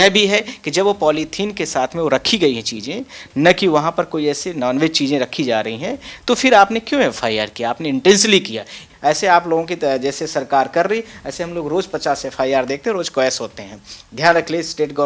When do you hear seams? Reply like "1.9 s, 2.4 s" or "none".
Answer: 8.8 s